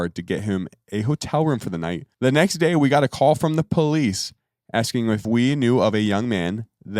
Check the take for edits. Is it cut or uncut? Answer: cut